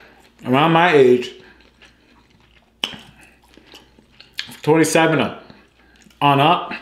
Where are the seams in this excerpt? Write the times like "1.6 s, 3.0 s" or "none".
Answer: none